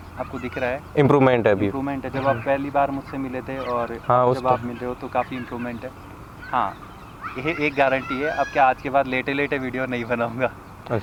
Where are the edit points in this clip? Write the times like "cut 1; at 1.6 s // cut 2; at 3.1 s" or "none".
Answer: none

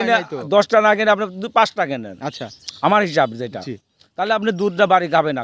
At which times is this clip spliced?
none

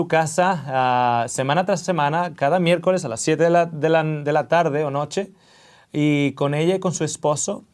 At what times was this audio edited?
none

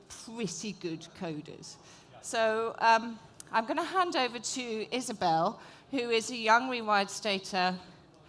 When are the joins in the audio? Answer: none

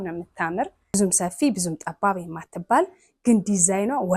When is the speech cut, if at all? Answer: cut 1; at 0.9 s

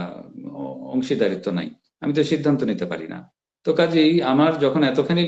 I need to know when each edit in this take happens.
none

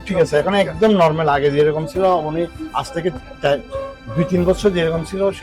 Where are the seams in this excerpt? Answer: none

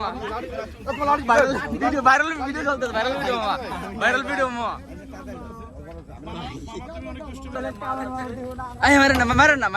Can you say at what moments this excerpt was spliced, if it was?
cut 1; at 7.6 s

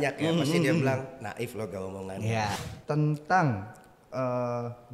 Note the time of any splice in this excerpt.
cut 1; at 2.6 s

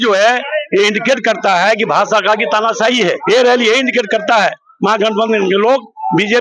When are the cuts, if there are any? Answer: cut 1; at 3.2 s

